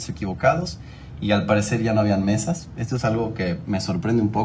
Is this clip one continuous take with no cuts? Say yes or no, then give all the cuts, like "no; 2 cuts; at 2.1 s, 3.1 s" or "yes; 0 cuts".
yes; 0 cuts